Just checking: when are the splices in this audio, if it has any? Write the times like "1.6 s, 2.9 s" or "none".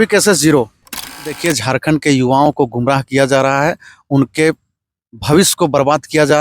1.4 s